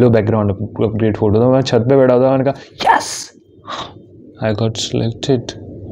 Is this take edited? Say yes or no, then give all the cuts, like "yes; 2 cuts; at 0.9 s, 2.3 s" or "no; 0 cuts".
no; 0 cuts